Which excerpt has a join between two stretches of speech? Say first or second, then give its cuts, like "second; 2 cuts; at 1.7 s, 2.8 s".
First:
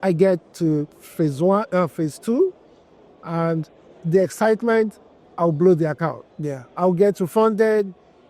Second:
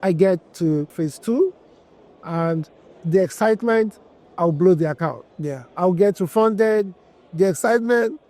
second; 1 cut; at 0.9 s